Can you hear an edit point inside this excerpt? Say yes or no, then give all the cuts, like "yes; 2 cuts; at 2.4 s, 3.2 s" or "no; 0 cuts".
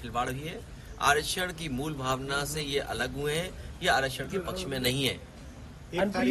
no; 0 cuts